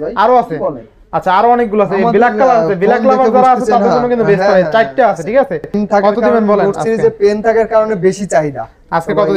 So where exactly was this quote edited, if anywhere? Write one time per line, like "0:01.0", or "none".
0:05.8